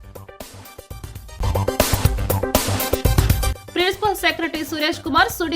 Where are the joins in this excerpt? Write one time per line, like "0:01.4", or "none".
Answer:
0:01.3
0:03.6